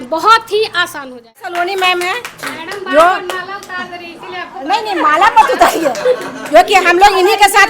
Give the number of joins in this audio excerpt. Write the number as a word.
one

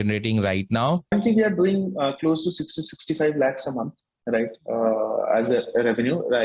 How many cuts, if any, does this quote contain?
one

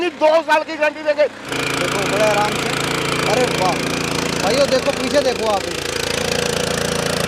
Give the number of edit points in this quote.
one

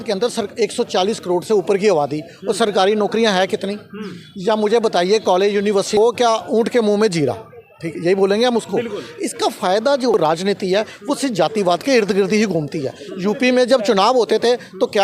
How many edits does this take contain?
two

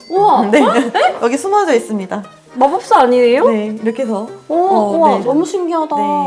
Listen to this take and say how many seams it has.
zero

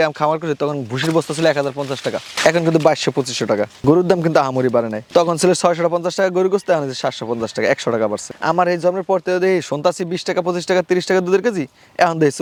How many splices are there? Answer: zero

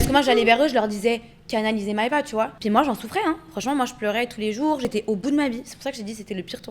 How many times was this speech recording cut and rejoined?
two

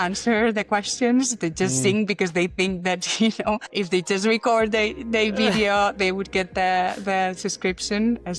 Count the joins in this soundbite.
one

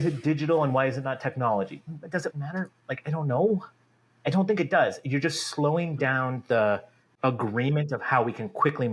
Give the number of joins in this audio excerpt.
one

